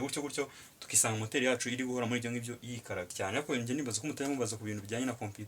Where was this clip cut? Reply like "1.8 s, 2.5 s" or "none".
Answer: 3.1 s